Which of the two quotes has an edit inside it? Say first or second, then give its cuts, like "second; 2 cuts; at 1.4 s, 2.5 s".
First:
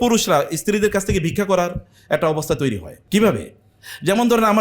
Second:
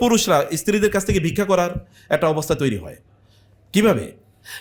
first; 1 cut; at 2.9 s